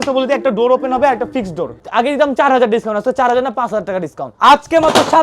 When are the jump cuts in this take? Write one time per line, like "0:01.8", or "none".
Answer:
0:01.8
0:04.2